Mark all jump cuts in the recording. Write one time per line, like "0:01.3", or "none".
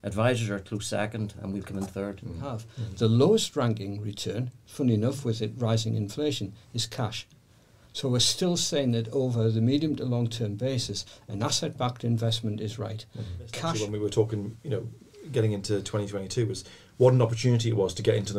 0:02.7
0:13.7